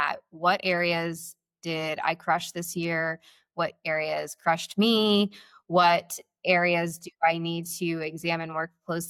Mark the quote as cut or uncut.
uncut